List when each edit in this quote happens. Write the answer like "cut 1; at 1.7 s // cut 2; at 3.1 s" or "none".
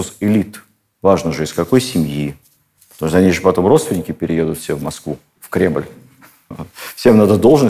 none